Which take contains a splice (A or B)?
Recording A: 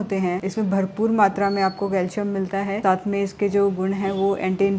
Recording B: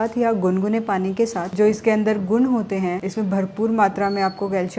B